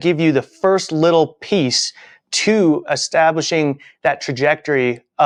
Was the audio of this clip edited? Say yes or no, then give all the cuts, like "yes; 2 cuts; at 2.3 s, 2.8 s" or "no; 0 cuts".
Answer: no; 0 cuts